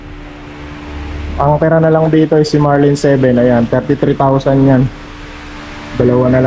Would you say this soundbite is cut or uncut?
uncut